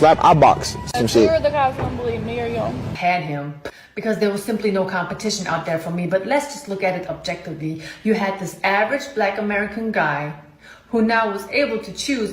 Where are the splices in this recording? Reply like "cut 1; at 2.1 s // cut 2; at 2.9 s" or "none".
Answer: cut 1; at 2.9 s